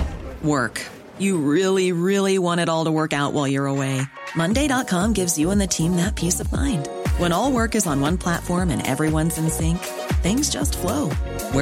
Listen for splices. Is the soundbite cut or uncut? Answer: uncut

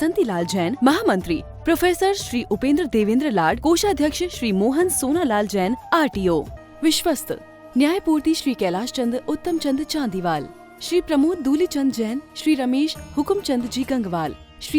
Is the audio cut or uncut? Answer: cut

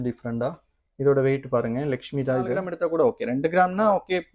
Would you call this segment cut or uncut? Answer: cut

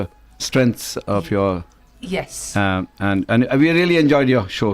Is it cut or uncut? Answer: cut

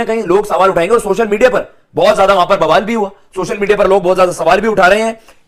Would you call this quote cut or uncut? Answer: uncut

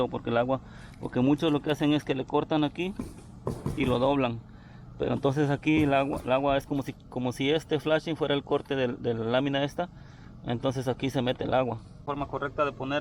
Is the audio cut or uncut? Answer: cut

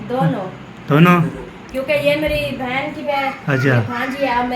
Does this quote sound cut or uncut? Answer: cut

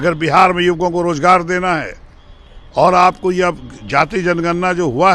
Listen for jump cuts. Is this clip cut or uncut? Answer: uncut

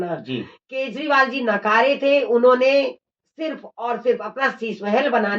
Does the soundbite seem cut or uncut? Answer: uncut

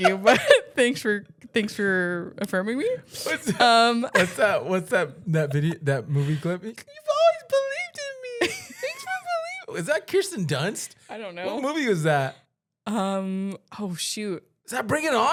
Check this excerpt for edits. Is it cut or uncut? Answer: uncut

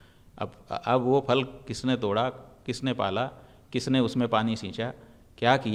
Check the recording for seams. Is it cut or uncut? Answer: uncut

